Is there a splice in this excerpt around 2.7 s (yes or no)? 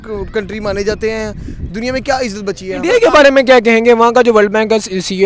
yes